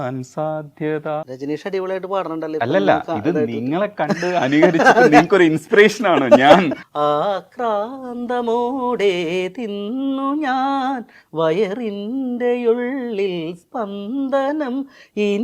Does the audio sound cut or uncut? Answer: cut